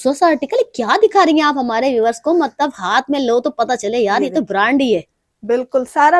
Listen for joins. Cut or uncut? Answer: uncut